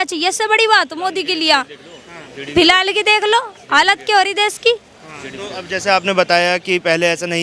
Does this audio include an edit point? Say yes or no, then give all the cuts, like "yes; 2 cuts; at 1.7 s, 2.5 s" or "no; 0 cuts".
no; 0 cuts